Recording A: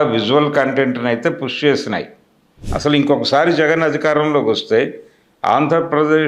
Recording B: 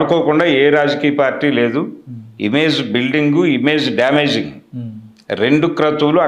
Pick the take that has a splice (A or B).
A